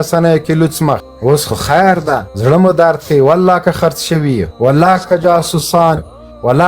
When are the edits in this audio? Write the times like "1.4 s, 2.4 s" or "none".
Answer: 1.1 s, 2.3 s, 4.5 s